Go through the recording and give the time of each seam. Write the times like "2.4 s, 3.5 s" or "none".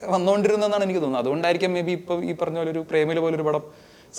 none